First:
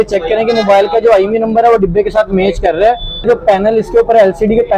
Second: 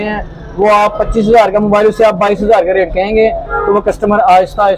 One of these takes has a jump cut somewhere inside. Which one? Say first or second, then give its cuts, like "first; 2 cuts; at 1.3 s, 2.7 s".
first; 1 cut; at 3.3 s